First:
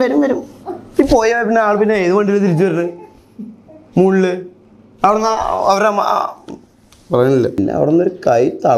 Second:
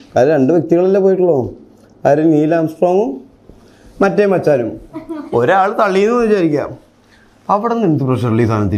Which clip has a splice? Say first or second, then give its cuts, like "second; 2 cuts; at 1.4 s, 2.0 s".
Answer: first; 1 cut; at 7.6 s